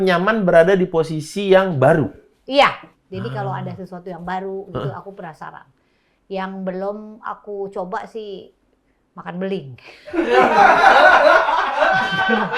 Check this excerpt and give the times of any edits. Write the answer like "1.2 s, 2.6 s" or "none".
2.9 s